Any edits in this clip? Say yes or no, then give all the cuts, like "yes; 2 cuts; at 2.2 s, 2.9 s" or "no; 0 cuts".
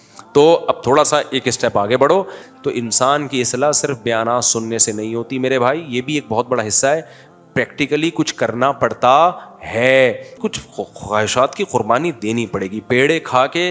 yes; 2 cuts; at 2.4 s, 10.4 s